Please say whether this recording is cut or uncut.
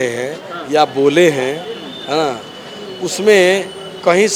uncut